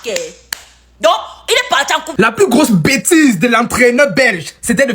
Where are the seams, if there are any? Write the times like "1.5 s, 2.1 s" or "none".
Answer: 2.1 s